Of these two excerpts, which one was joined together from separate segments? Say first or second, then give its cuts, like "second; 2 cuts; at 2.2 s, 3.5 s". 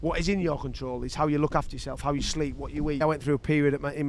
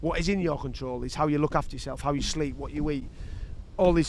first; 1 cut; at 3.0 s